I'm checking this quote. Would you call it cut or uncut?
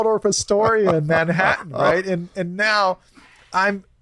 uncut